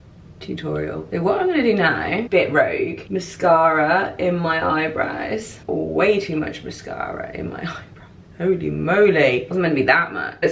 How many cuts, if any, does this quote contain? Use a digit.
0